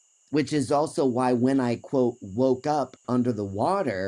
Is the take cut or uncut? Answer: uncut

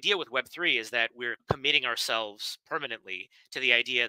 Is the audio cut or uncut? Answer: uncut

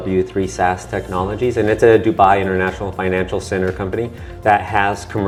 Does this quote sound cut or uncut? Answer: uncut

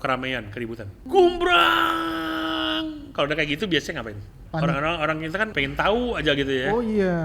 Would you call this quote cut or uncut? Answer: cut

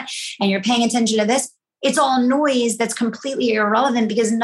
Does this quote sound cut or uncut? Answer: uncut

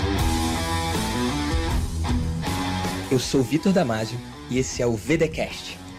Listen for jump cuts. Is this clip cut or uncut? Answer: uncut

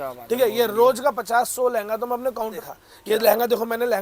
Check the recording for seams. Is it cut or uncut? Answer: cut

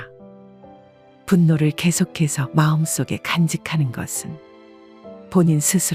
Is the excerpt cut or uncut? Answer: uncut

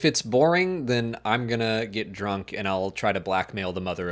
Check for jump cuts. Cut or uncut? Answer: uncut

